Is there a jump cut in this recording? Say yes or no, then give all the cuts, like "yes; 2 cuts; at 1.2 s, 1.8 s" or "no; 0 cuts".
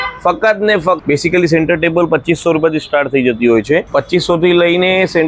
yes; 2 cuts; at 1.0 s, 3.9 s